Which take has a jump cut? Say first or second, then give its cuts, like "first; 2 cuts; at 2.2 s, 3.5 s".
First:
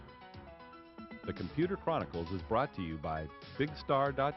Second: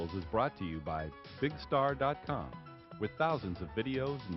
first; 1 cut; at 1.3 s